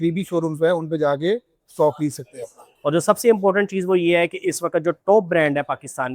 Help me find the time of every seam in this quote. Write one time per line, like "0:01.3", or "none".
0:02.7